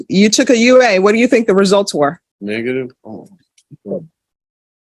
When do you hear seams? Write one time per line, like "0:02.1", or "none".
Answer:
0:02.3

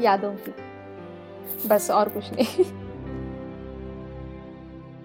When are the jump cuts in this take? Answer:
0:02.7

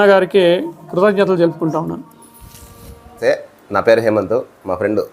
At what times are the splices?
0:03.3

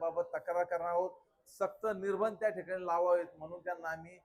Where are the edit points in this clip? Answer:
none

